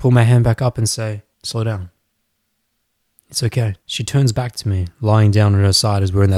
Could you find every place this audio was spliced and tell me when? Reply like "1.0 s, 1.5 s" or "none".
1.3 s, 3.8 s